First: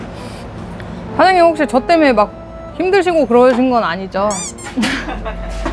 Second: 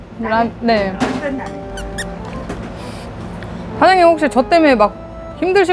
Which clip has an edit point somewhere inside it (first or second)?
second